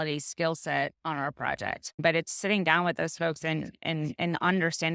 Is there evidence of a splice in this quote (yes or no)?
yes